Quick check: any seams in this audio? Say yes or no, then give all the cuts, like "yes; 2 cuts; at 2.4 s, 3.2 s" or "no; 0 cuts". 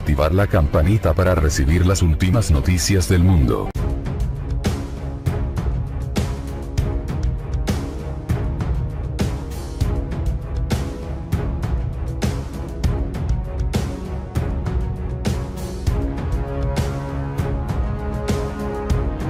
no; 0 cuts